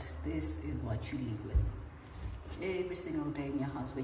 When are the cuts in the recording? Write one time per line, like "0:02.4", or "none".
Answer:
none